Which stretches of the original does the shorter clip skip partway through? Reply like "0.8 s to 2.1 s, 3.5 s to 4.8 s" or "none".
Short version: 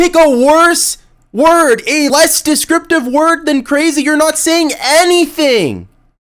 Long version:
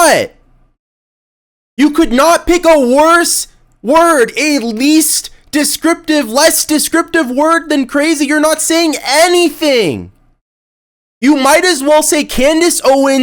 4.6 s to 6.3 s